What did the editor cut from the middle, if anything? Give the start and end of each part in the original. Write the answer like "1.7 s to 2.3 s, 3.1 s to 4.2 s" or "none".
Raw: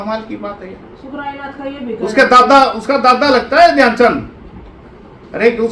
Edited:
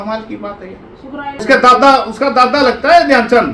1.4 s to 2.1 s